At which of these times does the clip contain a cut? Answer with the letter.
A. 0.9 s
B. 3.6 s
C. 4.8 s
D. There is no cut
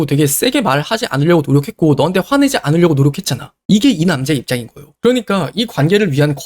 C